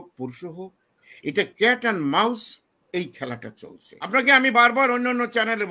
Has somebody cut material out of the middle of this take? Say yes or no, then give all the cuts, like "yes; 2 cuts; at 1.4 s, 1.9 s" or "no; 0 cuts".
yes; 1 cut; at 3.9 s